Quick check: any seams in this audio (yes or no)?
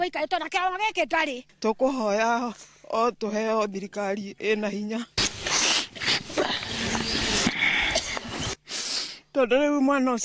yes